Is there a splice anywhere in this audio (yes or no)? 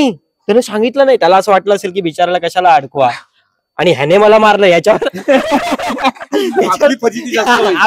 no